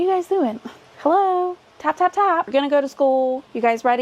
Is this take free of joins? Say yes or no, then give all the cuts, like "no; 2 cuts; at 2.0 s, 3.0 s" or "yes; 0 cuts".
no; 1 cut; at 2.5 s